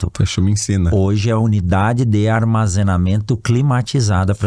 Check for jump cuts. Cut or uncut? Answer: uncut